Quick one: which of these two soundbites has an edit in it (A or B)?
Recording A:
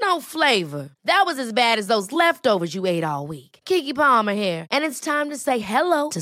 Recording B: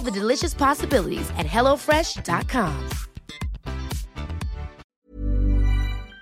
B